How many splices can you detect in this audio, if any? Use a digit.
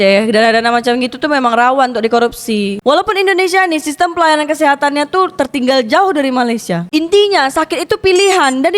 2